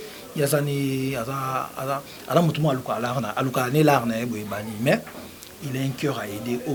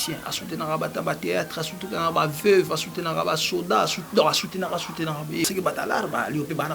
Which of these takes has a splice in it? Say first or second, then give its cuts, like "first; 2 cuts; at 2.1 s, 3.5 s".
second; 1 cut; at 5.5 s